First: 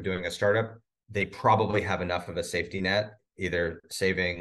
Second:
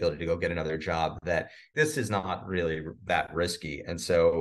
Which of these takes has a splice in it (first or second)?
second